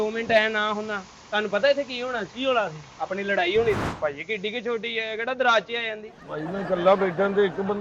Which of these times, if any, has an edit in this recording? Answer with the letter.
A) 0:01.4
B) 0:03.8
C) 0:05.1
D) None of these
B